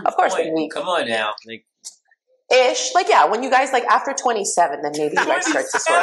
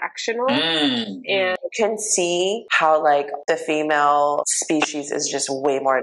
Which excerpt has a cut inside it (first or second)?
second